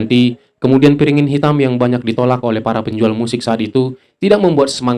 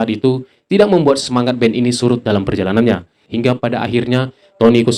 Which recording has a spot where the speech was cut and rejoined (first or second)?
second